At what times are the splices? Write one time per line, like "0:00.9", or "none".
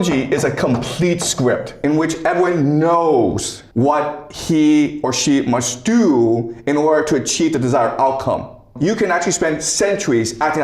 0:01.8
0:03.5
0:08.7